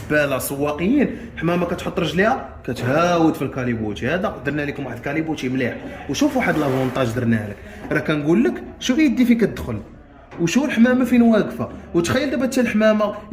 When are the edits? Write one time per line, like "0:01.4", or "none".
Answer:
none